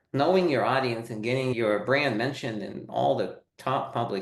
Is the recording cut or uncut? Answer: cut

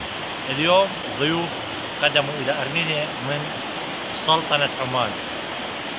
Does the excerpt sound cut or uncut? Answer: cut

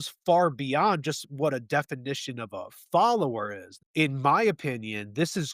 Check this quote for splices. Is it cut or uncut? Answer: cut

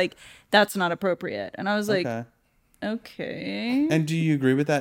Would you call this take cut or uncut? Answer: uncut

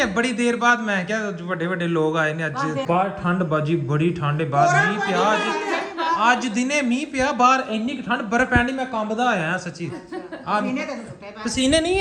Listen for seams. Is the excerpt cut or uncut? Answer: cut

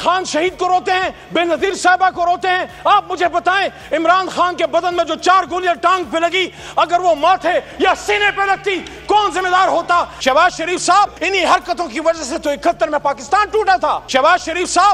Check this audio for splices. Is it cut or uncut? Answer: cut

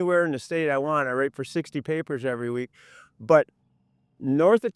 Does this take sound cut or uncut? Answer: uncut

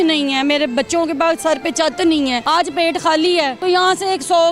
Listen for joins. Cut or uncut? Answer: cut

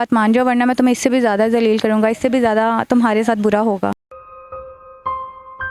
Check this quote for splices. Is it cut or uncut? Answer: uncut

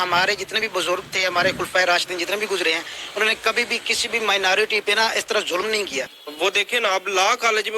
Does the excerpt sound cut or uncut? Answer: cut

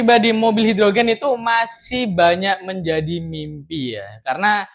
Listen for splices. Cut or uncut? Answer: uncut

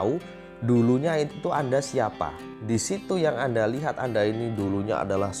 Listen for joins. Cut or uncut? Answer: cut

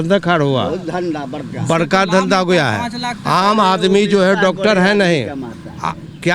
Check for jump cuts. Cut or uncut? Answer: uncut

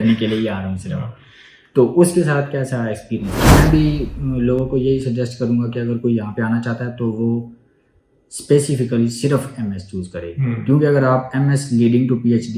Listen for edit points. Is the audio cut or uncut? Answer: cut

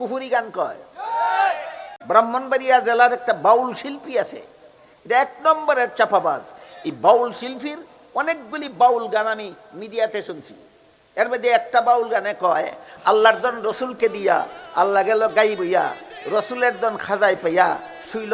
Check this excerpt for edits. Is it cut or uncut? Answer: cut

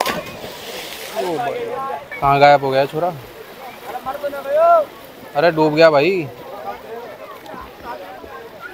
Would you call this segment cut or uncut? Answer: cut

